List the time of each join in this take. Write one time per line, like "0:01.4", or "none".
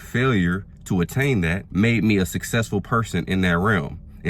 0:01.6

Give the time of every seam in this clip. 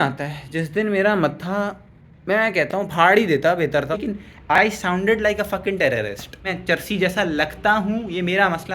0:04.0
0:06.5

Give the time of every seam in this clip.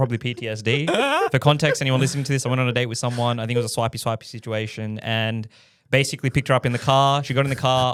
none

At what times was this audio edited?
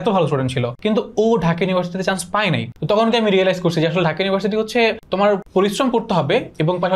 none

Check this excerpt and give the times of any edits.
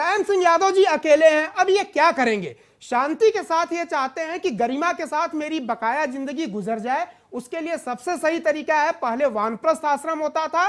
none

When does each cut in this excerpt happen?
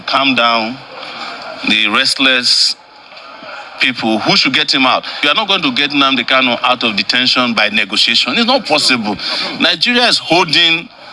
0:05.2

